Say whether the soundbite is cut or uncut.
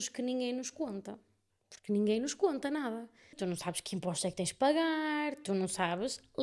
cut